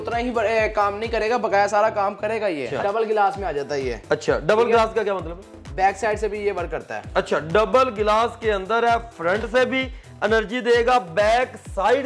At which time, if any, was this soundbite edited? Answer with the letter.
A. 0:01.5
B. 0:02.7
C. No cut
B